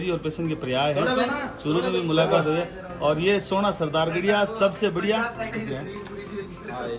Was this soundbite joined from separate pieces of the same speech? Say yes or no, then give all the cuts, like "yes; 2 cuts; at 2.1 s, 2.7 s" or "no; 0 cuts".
yes; 1 cut; at 5.5 s